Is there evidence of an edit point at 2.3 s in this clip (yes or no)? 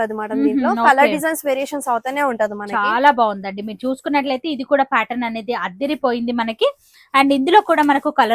no